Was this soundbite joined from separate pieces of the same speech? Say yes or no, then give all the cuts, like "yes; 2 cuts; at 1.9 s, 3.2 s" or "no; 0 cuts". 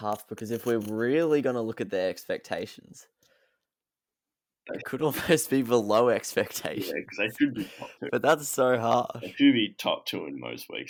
no; 0 cuts